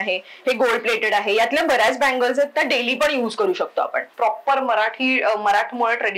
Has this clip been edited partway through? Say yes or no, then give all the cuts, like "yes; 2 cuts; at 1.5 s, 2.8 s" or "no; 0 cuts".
yes; 1 cut; at 4.1 s